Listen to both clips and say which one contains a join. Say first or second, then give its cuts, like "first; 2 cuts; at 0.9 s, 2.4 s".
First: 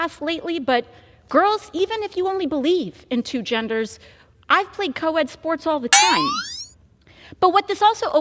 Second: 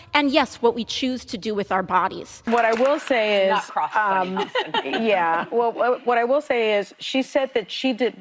second; 1 cut; at 2.5 s